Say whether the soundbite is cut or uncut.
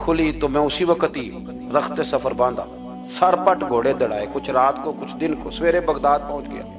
uncut